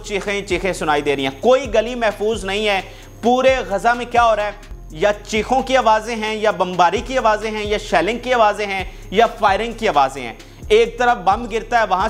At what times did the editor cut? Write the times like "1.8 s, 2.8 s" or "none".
none